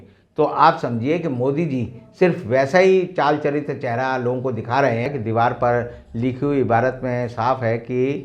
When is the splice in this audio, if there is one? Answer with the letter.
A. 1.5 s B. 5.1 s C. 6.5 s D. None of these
B